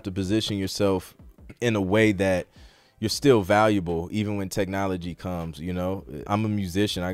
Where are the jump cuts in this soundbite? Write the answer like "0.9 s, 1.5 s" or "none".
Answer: 6.2 s